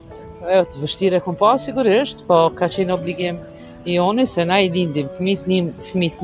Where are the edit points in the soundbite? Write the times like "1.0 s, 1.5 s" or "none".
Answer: none